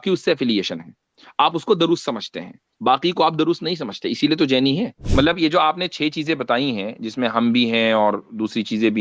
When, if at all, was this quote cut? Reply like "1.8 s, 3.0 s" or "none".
5.0 s